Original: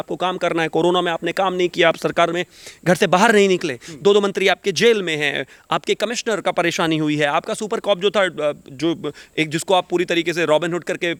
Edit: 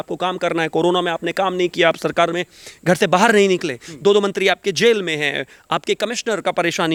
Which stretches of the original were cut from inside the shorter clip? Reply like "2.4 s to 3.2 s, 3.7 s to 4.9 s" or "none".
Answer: none